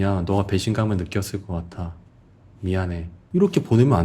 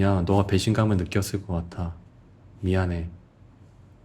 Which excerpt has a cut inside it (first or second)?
first